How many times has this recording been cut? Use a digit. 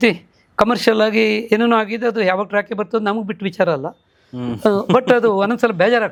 0